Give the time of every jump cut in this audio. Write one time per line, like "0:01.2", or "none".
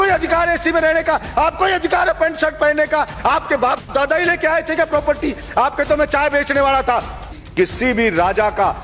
0:07.4